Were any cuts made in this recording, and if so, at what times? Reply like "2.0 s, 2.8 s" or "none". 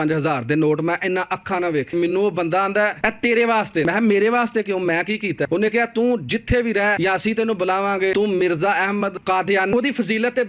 1.9 s, 3.0 s, 3.8 s, 5.5 s, 7.0 s, 8.1 s, 9.7 s